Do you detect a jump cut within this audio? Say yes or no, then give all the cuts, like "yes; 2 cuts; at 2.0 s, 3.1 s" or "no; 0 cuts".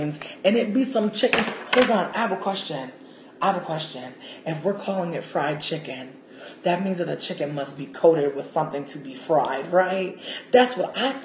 yes; 1 cut; at 2.1 s